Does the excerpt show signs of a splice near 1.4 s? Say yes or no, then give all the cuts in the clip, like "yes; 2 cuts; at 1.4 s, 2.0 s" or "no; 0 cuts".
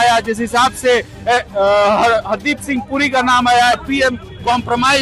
no; 1 cut; at 3.8 s